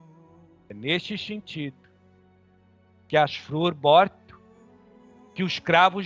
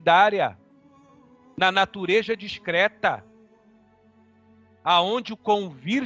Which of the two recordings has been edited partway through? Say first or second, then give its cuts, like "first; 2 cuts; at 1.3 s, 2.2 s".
second; 2 cuts; at 3.2 s, 4.8 s